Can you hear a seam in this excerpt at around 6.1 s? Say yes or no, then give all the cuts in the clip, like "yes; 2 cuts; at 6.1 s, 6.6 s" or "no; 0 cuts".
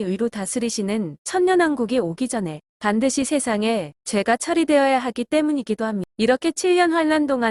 yes; 1 cut; at 6.1 s